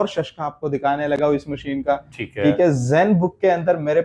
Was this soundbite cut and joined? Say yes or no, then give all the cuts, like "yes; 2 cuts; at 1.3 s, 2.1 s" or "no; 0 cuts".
no; 0 cuts